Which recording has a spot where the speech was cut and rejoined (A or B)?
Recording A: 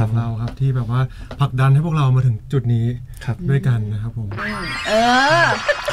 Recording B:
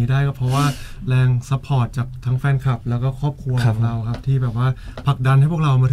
A